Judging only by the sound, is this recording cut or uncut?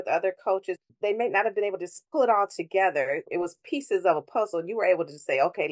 cut